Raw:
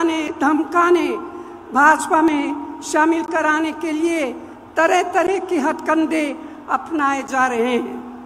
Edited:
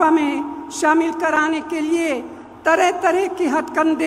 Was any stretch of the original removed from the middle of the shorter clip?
no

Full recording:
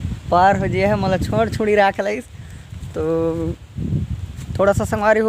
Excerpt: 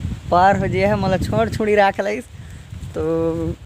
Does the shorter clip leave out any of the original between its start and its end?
no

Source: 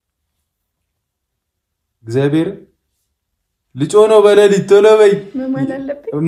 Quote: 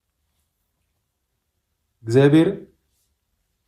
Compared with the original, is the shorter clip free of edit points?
yes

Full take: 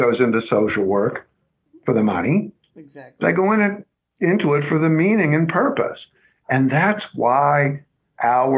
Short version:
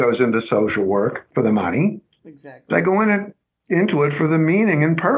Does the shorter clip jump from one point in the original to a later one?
yes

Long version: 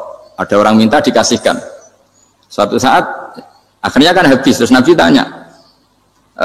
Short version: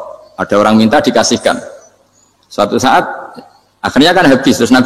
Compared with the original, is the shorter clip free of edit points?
yes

